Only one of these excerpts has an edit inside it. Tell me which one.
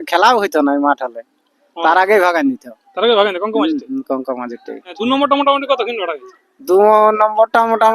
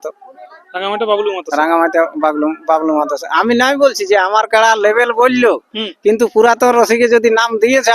first; 1 cut; at 4.9 s

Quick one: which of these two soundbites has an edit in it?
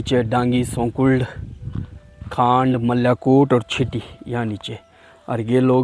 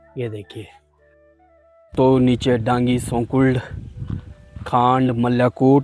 second; 1 cut; at 1.2 s

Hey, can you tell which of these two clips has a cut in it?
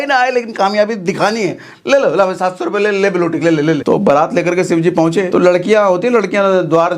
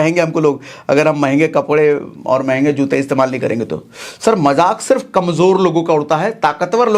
first; 2 cuts; at 3.8 s, 5.3 s

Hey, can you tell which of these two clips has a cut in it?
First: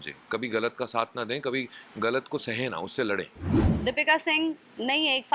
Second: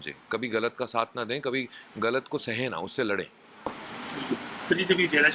first; 1 cut; at 3.5 s

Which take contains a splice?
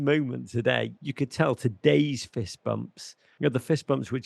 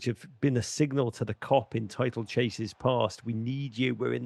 first; 2 cuts; at 1.0 s, 3.3 s

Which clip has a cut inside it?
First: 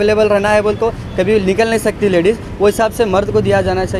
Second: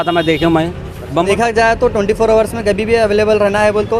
second; 1 cut; at 1.3 s

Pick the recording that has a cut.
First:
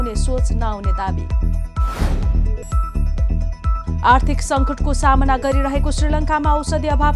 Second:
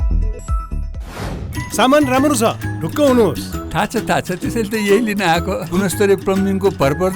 second; 1 cut; at 1.4 s

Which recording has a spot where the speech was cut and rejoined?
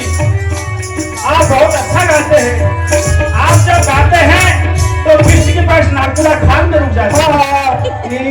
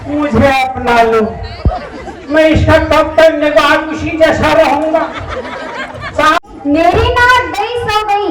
second; 1 cut; at 6.4 s

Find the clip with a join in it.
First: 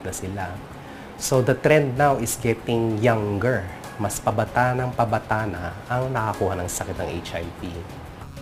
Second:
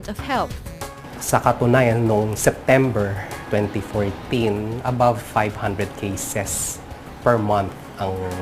second; 1 cut; at 3.7 s

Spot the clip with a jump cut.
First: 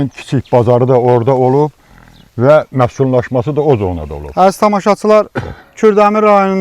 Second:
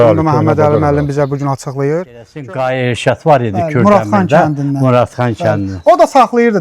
second; 1 cut; at 2.4 s

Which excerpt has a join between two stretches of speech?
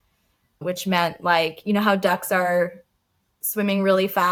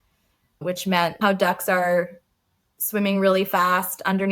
second; 1 cut; at 1.2 s

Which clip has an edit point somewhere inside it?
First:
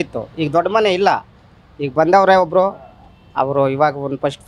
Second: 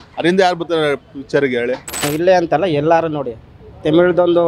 second; 1 cut; at 2.0 s

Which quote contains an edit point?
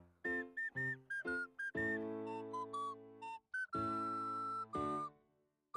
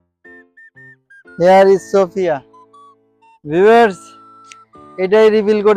second; 1 cut; at 1.4 s

